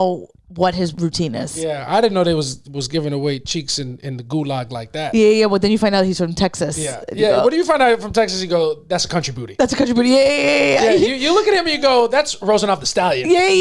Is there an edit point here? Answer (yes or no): yes